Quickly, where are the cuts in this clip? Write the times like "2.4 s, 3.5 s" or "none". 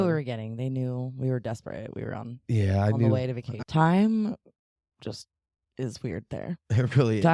3.5 s